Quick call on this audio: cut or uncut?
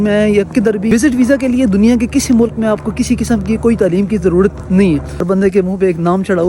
cut